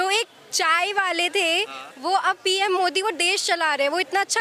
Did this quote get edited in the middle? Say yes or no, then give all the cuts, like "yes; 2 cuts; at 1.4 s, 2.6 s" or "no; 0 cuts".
no; 0 cuts